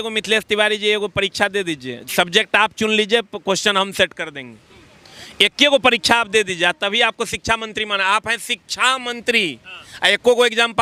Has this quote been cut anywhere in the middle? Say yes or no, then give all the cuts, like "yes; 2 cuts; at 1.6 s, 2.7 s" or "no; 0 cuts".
no; 0 cuts